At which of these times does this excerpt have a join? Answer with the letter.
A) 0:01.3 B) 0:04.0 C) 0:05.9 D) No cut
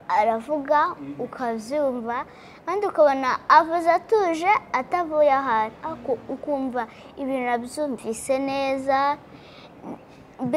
D